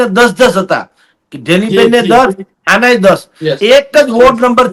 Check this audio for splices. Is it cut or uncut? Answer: uncut